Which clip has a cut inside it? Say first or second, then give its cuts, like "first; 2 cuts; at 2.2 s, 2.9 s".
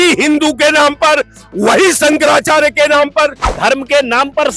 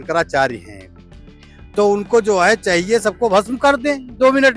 first; 1 cut; at 3.4 s